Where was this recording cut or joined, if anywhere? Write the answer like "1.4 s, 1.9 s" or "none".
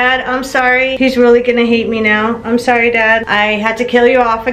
0.9 s, 3.3 s